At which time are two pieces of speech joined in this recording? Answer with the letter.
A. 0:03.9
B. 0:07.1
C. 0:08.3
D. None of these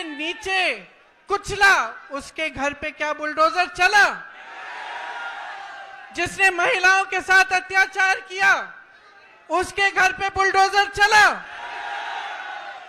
D